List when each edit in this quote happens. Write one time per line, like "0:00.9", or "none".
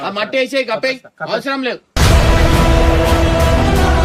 none